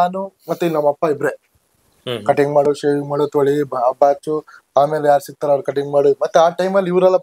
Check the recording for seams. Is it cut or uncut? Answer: uncut